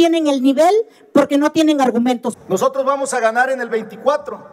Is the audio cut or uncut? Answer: cut